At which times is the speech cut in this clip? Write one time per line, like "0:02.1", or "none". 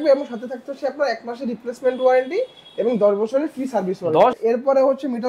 0:04.4